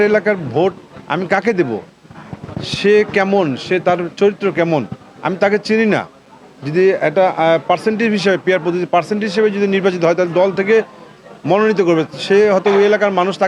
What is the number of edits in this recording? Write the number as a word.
zero